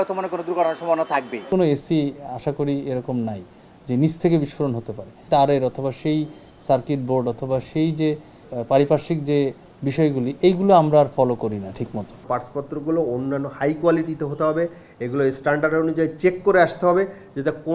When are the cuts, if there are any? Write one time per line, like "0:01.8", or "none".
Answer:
0:01.5
0:05.2
0:08.4
0:12.2

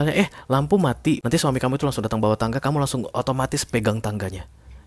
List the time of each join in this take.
0:01.2

